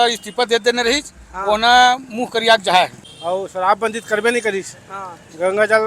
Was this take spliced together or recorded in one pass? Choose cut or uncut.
cut